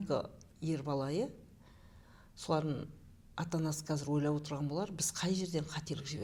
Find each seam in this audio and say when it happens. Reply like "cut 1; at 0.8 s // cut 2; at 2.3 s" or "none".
none